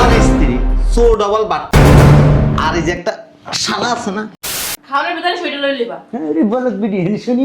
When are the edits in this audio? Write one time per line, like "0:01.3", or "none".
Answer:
0:04.3

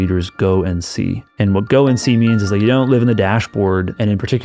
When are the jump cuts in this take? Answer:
none

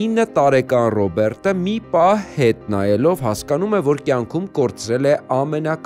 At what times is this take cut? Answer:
none

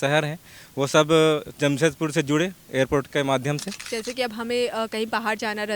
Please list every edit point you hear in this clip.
0:03.9

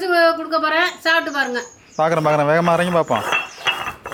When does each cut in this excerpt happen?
none

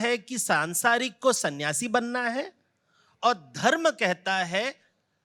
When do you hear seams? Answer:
none

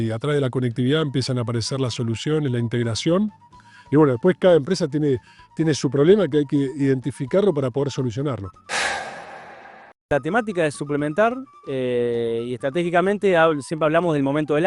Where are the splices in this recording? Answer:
0:08.5
0:10.1

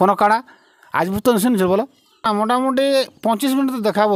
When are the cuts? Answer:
0:02.2

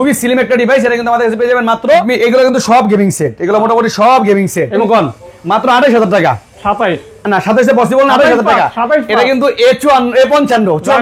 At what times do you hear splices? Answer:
0:02.0
0:04.8

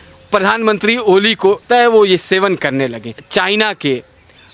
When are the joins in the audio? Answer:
0:01.6
0:03.2

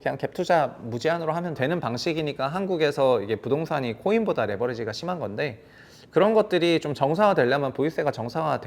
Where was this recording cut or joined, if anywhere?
0:01.6

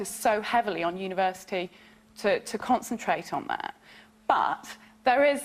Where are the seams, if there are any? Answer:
none

